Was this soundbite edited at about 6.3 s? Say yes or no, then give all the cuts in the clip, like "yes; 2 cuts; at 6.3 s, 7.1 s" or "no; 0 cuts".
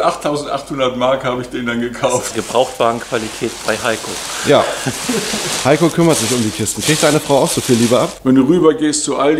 no; 2 cuts; at 2.3 s, 8.2 s